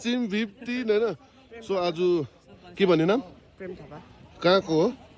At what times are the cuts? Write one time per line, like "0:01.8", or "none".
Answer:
none